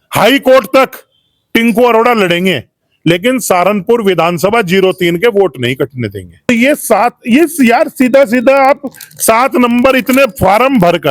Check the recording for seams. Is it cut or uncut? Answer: cut